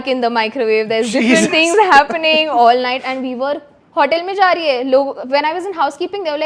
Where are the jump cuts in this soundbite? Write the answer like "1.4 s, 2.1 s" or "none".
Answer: 3.8 s